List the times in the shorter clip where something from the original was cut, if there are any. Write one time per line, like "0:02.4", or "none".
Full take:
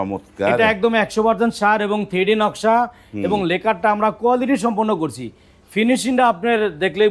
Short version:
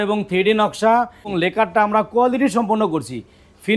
0:01.3